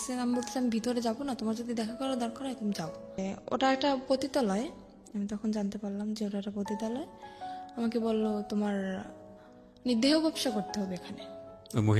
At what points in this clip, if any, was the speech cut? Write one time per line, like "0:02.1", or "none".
0:03.3